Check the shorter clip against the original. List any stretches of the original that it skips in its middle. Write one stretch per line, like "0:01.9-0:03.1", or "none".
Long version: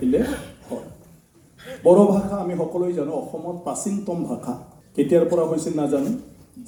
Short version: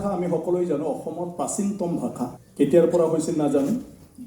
0:04.7-0:04.8